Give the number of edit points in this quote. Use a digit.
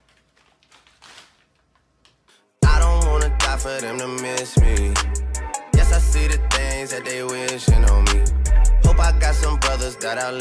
0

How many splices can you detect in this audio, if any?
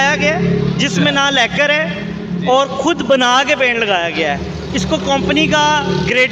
0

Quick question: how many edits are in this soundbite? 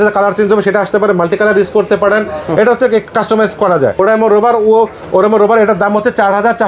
0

